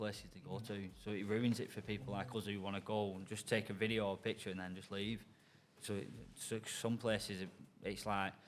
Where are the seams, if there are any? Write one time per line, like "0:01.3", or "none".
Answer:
none

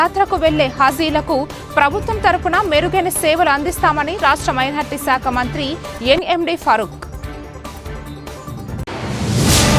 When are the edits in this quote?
0:06.9
0:08.8

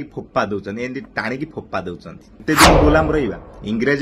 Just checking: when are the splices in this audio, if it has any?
0:02.4

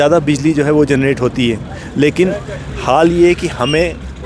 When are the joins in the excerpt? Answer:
none

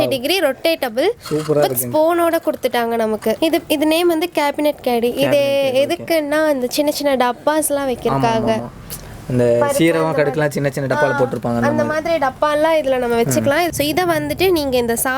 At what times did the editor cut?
0:03.4
0:13.7

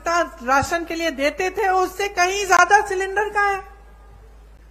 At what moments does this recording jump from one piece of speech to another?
none

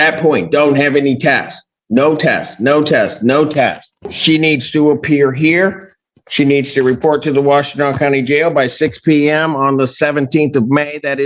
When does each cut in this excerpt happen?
0:03.9

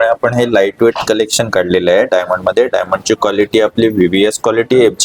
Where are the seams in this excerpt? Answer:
none

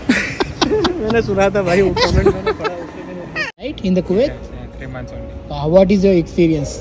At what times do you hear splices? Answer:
0:03.5

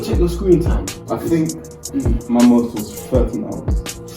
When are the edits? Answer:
0:01.1

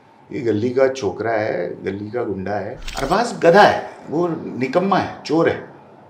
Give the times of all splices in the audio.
0:02.8

